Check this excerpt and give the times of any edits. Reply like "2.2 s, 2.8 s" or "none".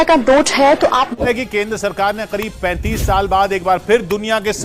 1.1 s